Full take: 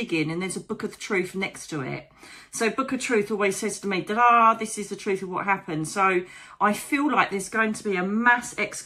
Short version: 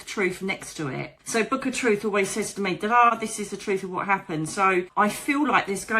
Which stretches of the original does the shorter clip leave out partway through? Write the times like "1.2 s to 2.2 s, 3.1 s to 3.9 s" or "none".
2.1 s to 2.4 s, 4.4 s to 4.5 s, 6.3 s to 6.5 s